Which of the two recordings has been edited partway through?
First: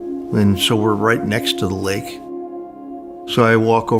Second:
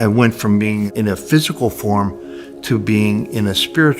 second; 1 cut; at 0.9 s

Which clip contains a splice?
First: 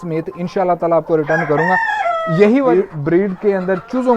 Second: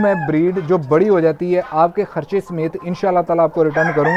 first; 1 cut; at 2.7 s

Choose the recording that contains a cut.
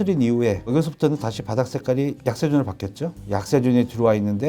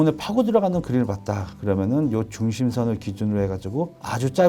first; 1 cut; at 3.1 s

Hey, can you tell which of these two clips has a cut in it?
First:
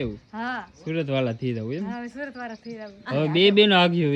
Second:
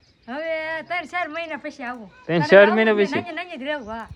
first; 1 cut; at 3.0 s

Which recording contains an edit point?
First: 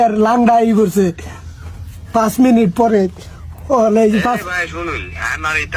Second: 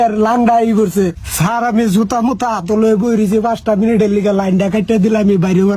second; 1 cut; at 1.2 s

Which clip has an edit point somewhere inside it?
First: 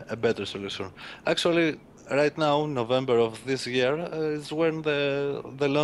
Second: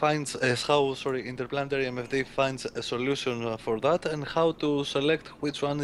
second; 1 cut; at 2.2 s

